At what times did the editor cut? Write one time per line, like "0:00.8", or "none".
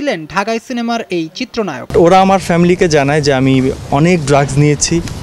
0:01.9